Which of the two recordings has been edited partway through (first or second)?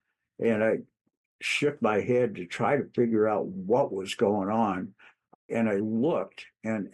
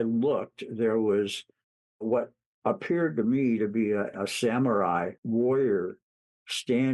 second